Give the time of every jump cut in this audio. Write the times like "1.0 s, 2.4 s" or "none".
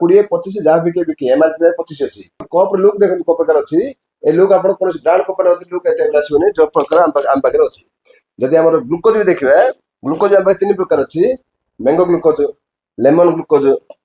2.5 s